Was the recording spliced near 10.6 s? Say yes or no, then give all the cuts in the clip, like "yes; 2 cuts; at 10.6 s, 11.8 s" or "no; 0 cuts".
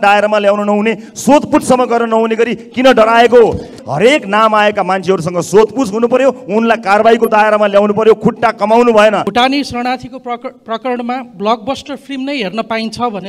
no; 2 cuts; at 3.8 s, 9.3 s